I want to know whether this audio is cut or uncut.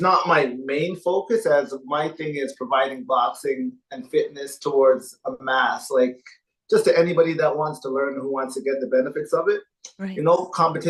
uncut